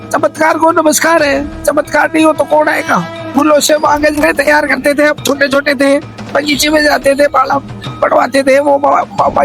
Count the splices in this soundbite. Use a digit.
1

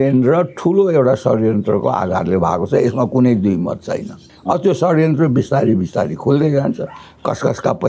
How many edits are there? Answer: 1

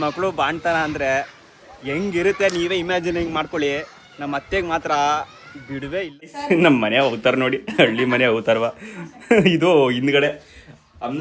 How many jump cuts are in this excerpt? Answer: 1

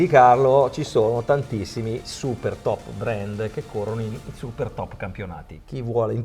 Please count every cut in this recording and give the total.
0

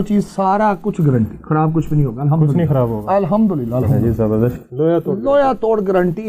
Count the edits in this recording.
1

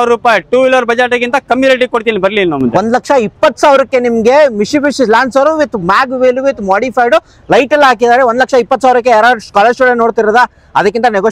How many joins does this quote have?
0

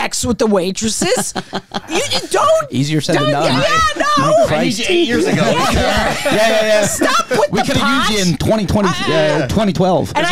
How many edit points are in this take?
0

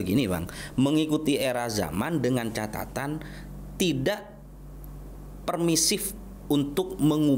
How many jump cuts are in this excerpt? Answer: 0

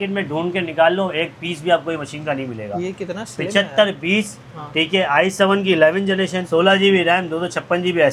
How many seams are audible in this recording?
0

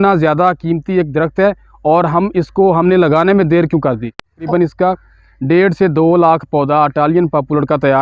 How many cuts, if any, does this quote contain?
1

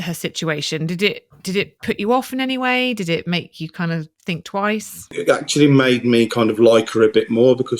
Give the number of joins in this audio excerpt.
1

